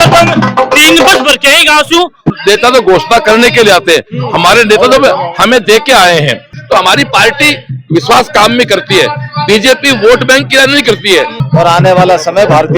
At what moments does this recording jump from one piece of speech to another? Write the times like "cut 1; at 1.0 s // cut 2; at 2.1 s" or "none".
cut 1; at 2.2 s // cut 2; at 6.4 s // cut 3; at 11.4 s